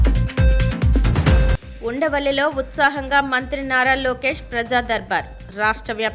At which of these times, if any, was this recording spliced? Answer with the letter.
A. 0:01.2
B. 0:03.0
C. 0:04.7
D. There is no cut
A